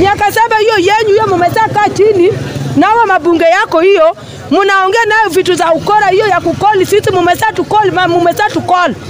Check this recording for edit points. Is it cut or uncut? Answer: uncut